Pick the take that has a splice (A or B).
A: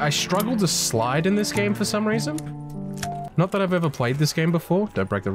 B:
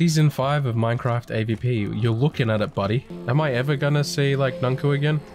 B